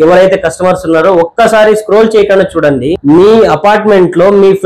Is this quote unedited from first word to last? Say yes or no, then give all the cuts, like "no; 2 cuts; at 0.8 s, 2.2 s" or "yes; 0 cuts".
no; 1 cut; at 3.0 s